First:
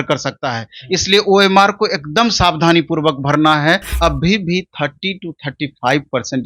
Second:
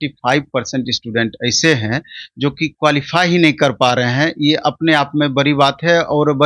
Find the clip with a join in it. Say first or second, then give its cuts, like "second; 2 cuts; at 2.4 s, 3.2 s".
first; 1 cut; at 3.9 s